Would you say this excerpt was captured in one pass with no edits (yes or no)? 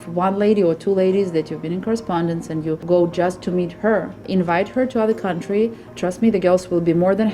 no